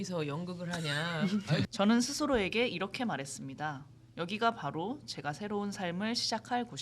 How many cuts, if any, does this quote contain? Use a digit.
1